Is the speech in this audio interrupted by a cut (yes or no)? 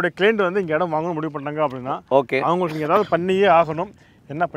no